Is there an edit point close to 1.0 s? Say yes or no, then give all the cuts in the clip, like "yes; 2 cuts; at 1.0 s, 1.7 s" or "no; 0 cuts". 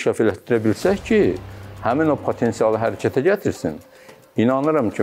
no; 0 cuts